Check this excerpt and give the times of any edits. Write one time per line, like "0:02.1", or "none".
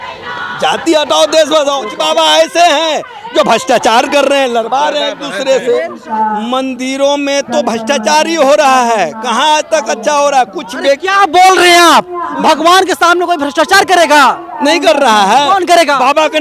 0:01.9
0:06.0